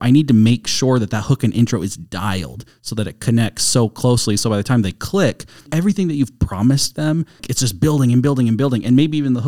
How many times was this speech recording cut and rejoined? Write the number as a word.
two